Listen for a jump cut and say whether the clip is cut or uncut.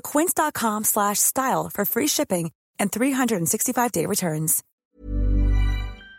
cut